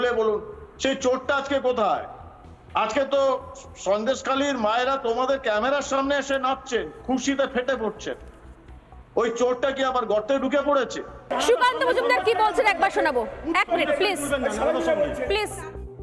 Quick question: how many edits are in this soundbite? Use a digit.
1